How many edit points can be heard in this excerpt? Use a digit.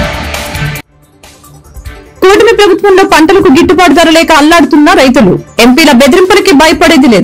1